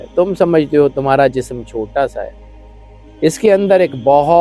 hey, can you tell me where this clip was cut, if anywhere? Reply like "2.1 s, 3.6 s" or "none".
none

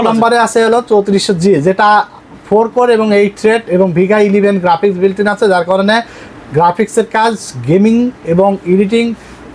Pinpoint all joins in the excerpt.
none

